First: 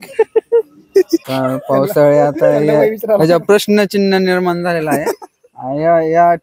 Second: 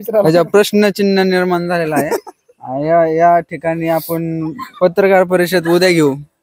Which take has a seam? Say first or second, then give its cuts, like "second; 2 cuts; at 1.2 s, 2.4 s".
first; 1 cut; at 1.2 s